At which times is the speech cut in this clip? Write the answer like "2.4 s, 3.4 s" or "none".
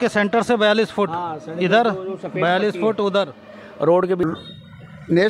4.2 s